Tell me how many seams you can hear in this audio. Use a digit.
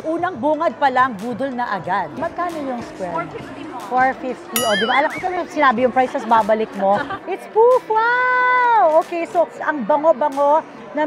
2